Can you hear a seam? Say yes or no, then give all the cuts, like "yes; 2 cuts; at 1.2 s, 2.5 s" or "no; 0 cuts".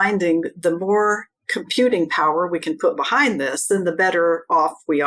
no; 0 cuts